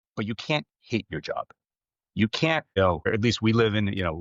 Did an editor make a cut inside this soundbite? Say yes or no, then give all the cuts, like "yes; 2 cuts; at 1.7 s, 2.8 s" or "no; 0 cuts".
no; 0 cuts